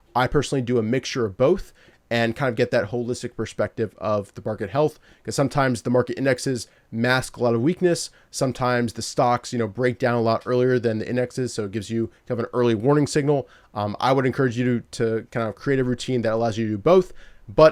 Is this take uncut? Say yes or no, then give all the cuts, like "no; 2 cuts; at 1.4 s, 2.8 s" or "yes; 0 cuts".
yes; 0 cuts